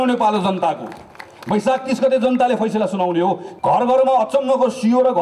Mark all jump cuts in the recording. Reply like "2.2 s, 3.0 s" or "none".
3.5 s